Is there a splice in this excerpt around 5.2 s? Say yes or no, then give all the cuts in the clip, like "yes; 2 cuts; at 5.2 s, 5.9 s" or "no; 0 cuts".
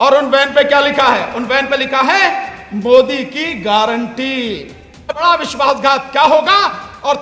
yes; 1 cut; at 5.2 s